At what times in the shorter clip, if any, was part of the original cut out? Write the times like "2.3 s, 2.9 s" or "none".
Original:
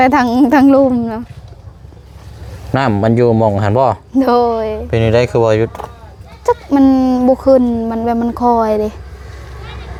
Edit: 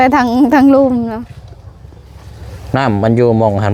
none